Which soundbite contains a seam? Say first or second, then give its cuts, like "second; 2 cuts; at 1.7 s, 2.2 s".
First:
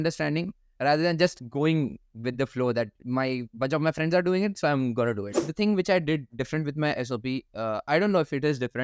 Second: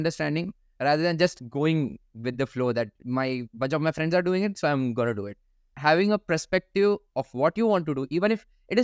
first; 1 cut; at 5.4 s